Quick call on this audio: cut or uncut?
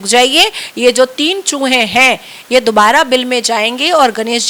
uncut